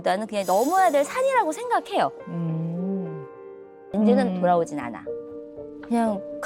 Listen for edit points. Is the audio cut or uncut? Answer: cut